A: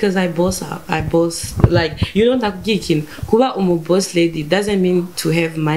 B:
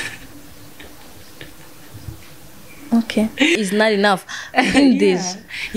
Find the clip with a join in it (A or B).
B